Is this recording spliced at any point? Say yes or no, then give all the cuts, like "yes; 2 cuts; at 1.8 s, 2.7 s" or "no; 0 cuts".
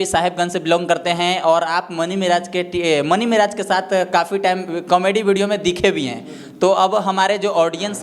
no; 0 cuts